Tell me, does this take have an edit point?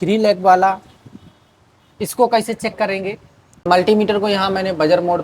yes; 1 cut; at 3.7 s

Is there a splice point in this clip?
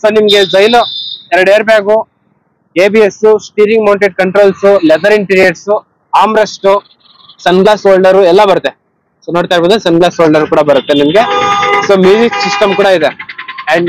no; 0 cuts

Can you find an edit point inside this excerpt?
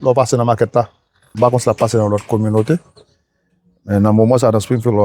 yes; 1 cut; at 1.3 s

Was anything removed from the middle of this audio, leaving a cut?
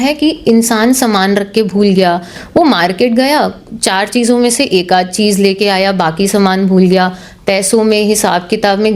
no; 0 cuts

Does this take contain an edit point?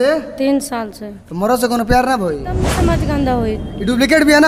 yes; 1 cut; at 2.8 s

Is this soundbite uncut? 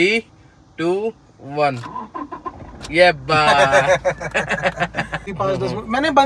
no; 1 cut; at 5.3 s

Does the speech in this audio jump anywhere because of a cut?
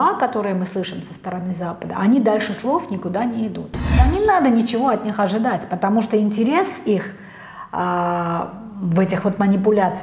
yes; 1 cut; at 3.9 s

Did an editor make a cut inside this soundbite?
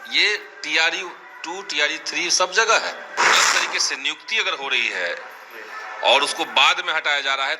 yes; 1 cut; at 3.3 s

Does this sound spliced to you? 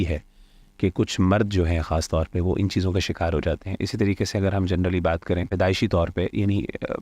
yes; 1 cut; at 5.5 s

